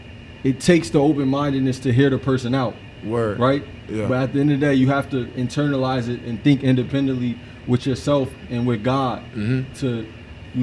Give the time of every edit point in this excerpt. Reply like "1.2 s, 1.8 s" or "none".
none